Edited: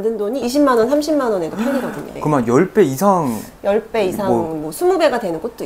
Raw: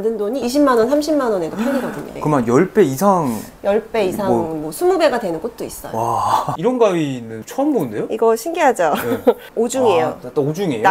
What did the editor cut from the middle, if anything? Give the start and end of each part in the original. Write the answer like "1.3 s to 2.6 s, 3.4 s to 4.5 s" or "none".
none